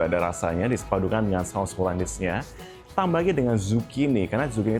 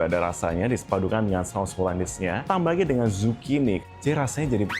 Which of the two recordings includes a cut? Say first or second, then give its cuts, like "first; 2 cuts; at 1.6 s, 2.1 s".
second; 2 cuts; at 2.4 s, 3.8 s